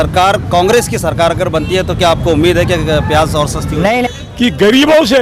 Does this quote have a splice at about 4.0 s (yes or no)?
yes